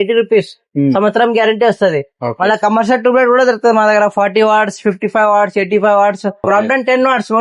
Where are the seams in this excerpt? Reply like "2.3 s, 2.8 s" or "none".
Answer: 6.4 s